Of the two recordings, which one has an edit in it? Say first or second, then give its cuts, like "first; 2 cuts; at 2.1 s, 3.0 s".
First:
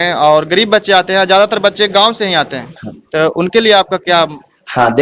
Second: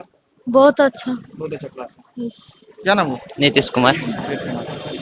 second; 1 cut; at 2.7 s